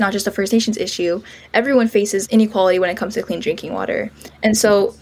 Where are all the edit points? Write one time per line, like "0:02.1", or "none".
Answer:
0:02.2